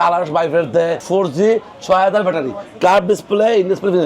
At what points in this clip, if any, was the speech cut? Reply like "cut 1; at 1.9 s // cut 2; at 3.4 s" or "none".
cut 1; at 1.0 s